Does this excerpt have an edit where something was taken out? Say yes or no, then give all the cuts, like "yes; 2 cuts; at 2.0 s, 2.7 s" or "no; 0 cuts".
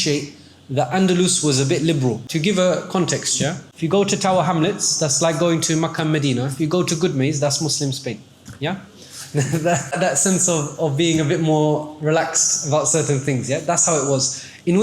yes; 2 cuts; at 2.2 s, 3.7 s